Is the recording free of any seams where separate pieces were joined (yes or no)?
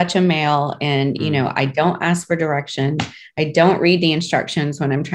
yes